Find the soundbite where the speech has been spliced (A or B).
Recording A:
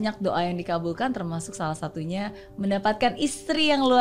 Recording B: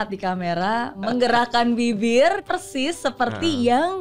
B